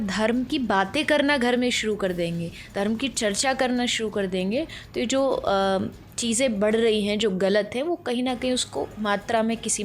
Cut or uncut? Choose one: uncut